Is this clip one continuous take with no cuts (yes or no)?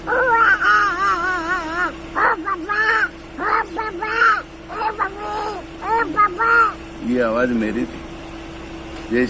yes